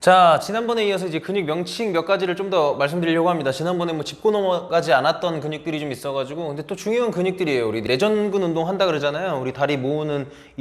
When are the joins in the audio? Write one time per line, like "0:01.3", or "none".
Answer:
0:07.8